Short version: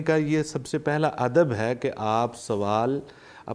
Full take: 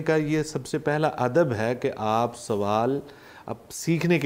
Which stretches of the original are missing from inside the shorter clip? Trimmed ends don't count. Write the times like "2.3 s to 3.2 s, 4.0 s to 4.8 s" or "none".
none